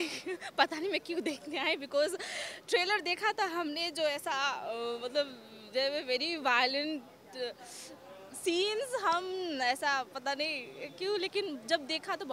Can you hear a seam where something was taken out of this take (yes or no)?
no